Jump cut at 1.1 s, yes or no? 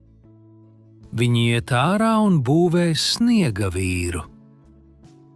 yes